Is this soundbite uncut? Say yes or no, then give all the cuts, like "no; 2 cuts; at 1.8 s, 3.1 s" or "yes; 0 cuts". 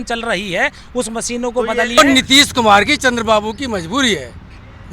no; 1 cut; at 2.0 s